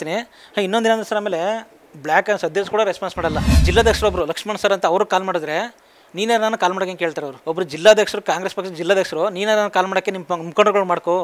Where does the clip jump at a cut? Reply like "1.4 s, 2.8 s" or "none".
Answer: 3.6 s, 7.3 s